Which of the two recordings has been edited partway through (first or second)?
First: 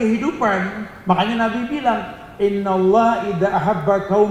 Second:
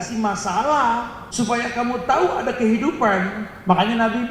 second